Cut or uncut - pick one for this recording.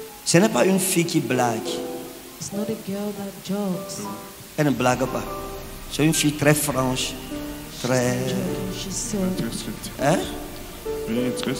uncut